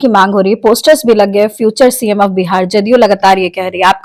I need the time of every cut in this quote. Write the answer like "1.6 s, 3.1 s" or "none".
none